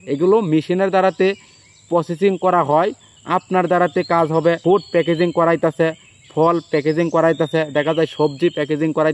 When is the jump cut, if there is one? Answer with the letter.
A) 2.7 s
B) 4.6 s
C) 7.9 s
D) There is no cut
B